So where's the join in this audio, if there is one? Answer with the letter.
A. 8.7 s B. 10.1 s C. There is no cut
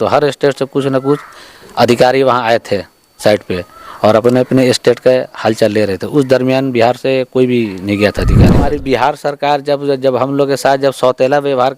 A